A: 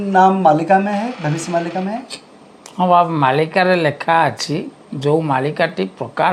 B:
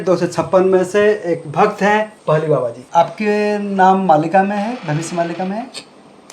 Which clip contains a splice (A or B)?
B